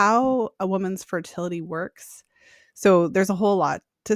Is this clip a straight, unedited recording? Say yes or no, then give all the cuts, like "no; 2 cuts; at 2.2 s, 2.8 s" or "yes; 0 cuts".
yes; 0 cuts